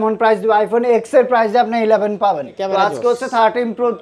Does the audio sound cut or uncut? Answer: cut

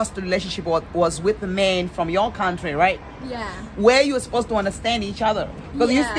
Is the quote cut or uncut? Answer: uncut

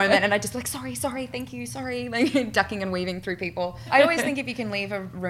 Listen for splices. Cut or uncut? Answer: cut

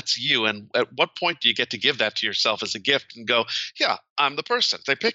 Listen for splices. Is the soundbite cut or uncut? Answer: uncut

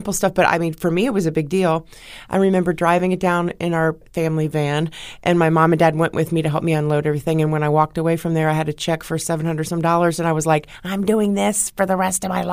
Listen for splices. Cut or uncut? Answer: cut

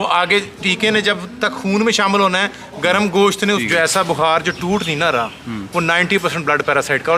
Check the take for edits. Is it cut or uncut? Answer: cut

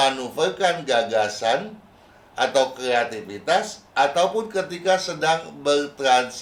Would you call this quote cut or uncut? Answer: uncut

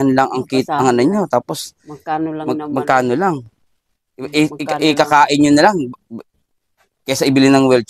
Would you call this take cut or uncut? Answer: uncut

